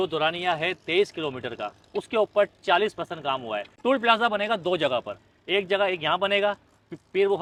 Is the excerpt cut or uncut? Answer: uncut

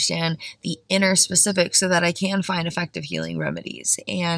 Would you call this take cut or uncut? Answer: uncut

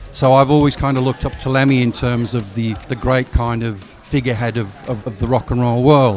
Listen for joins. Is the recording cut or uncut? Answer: cut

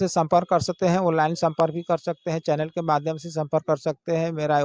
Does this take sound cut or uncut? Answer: uncut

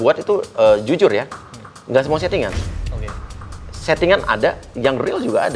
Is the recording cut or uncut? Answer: uncut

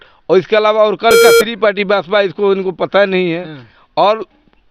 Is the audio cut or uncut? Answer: cut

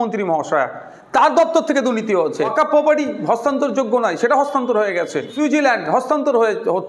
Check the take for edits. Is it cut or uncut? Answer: cut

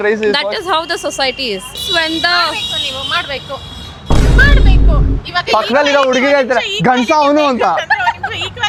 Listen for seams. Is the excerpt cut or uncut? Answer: uncut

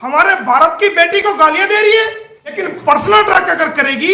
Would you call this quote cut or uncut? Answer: cut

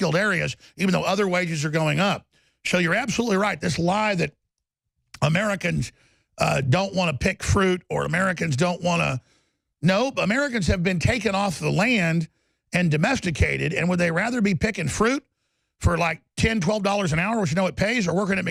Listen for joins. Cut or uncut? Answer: uncut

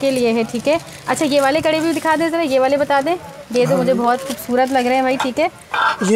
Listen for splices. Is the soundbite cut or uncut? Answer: uncut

